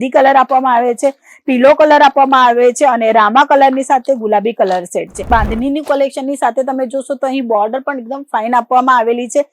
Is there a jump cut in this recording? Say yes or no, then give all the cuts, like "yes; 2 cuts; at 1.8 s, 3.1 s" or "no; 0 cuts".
yes; 1 cut; at 5.3 s